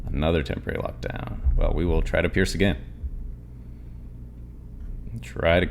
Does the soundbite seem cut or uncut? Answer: uncut